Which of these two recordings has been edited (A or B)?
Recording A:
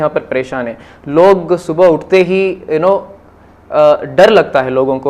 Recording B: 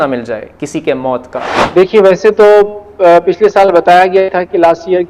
B